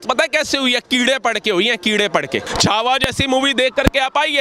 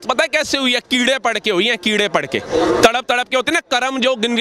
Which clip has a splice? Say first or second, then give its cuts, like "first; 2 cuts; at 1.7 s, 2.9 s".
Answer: first; 1 cut; at 2.4 s